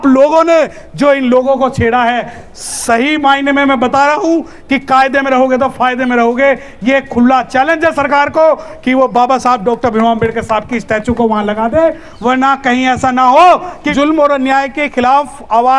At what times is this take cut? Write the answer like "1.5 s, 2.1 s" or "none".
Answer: 13.9 s

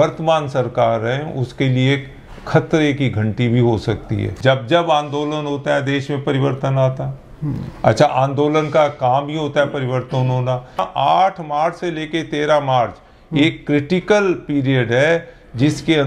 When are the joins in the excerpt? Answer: 4.2 s, 10.8 s

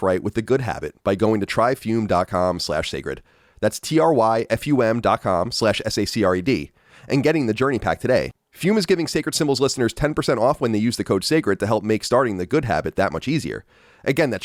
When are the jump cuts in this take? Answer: none

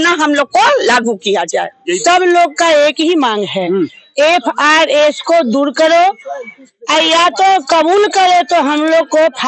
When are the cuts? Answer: 1.8 s

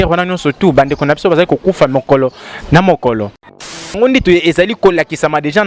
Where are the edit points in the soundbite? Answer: 3.9 s

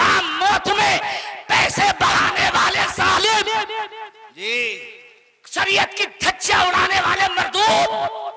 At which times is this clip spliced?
none

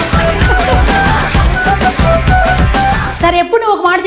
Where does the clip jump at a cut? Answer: none

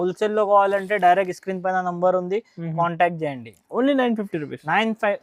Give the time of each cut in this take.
none

